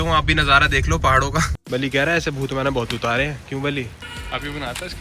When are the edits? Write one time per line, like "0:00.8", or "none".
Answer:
0:01.6
0:04.0